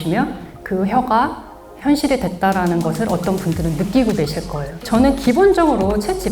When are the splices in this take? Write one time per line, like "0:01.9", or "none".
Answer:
0:04.8